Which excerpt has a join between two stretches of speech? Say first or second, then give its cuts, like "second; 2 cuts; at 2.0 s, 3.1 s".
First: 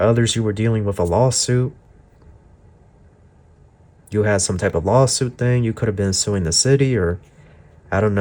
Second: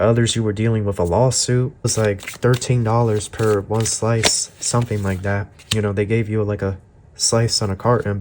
second; 1 cut; at 1.9 s